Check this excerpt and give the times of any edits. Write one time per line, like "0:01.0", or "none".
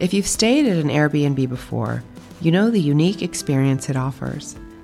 none